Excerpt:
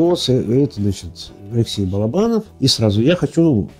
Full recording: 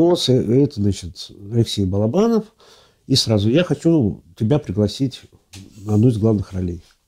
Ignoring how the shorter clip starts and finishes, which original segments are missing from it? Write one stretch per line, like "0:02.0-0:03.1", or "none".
0:02.5-0:03.0